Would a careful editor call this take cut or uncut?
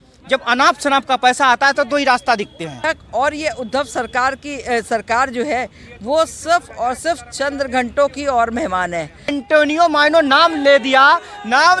cut